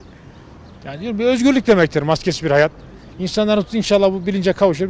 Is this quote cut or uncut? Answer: uncut